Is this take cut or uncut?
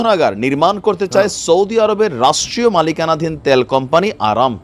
uncut